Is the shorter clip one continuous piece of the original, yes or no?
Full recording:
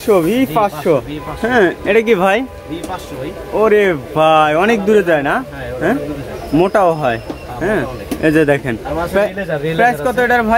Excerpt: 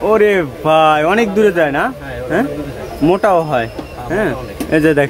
yes